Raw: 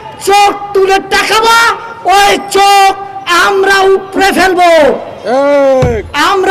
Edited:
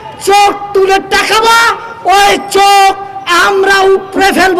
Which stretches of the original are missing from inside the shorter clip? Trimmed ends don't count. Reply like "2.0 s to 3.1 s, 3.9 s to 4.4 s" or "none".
none